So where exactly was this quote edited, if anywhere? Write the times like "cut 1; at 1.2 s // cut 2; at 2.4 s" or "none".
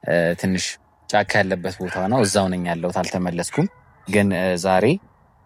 none